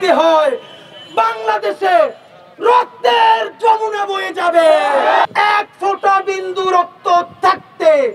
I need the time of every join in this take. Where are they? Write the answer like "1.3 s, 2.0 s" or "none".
5.3 s